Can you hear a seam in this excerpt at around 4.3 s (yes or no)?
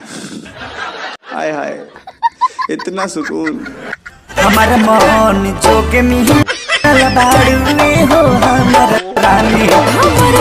yes